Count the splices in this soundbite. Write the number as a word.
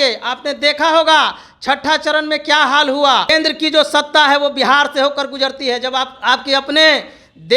one